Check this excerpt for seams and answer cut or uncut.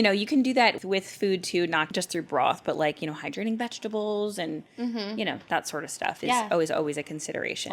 cut